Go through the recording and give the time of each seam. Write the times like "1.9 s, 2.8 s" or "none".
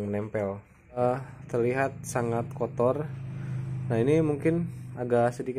1.0 s